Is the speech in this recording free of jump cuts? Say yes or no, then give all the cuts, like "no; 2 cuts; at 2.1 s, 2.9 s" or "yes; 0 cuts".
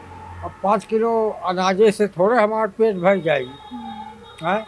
yes; 0 cuts